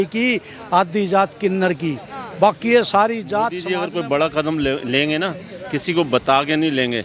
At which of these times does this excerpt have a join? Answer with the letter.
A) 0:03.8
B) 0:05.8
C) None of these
A